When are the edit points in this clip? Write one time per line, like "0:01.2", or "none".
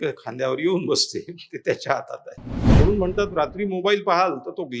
0:02.8